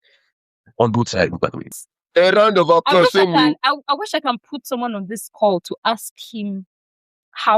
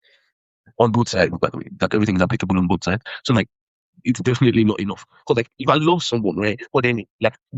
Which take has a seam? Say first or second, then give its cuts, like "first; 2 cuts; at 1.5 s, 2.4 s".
first; 1 cut; at 1.7 s